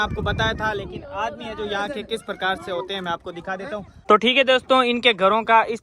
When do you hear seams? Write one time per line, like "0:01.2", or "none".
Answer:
0:04.0